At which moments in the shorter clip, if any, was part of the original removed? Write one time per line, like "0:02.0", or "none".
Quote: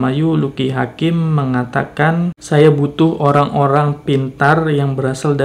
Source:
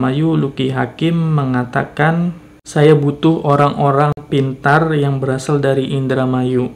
0:02.4